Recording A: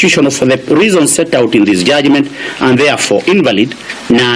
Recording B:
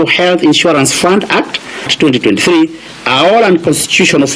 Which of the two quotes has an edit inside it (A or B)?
B